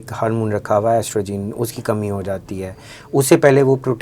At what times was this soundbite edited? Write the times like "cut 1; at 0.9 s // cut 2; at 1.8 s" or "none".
none